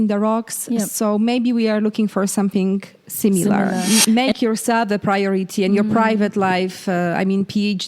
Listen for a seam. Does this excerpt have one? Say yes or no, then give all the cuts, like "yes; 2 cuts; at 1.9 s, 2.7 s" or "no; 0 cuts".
yes; 1 cut; at 3.8 s